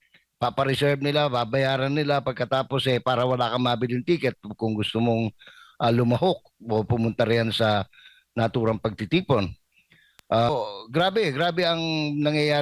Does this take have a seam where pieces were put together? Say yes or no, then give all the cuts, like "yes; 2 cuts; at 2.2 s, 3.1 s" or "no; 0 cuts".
yes; 1 cut; at 10.5 s